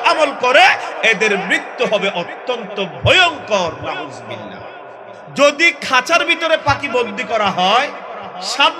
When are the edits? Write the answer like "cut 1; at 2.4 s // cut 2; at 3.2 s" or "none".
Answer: cut 1; at 5.2 s